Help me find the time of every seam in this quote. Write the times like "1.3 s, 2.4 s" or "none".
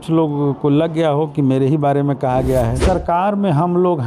2.8 s